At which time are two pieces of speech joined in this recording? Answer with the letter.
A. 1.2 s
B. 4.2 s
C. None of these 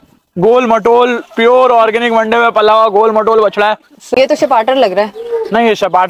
B